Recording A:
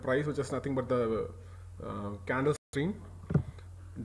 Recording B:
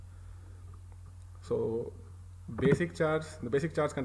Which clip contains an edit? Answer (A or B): A